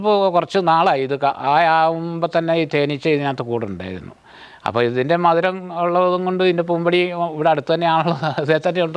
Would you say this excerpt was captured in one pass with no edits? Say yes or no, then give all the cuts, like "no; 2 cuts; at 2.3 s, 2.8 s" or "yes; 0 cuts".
yes; 0 cuts